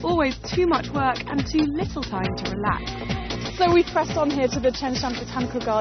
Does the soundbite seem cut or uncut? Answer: uncut